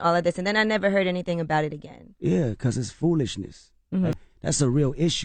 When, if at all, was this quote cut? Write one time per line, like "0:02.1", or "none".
0:04.2